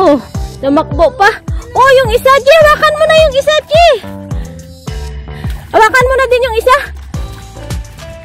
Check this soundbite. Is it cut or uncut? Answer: cut